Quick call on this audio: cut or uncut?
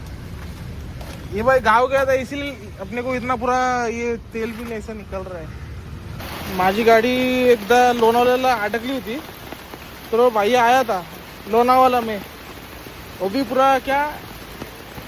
cut